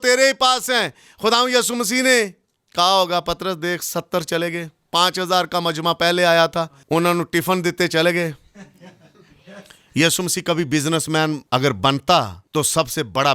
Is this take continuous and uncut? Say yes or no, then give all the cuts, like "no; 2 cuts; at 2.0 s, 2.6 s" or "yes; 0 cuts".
no; 3 cuts; at 6.8 s, 11.4 s, 12.4 s